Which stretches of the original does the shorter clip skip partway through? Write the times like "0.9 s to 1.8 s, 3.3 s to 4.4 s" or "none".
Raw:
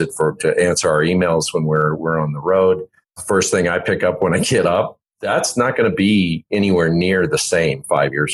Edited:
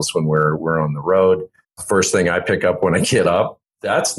none